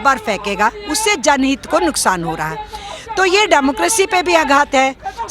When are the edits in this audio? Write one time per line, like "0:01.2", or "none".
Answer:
none